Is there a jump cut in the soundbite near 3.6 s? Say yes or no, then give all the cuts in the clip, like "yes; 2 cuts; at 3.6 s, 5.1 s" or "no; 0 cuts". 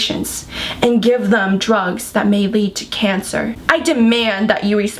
yes; 1 cut; at 3.6 s